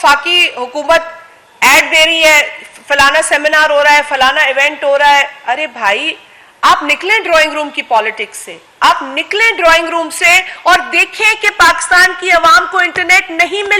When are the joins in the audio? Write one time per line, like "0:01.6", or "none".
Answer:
none